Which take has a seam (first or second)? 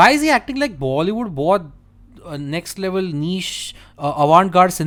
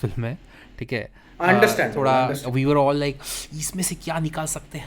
second